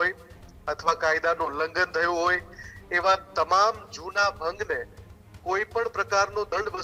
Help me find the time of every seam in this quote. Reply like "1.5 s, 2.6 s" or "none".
none